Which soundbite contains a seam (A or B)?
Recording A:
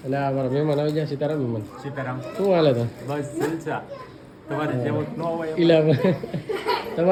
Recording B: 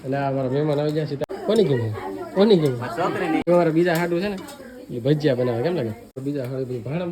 B